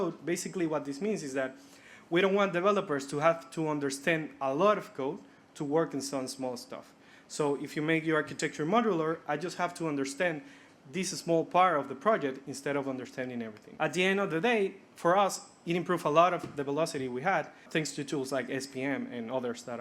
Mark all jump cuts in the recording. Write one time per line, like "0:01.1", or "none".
0:13.6
0:17.6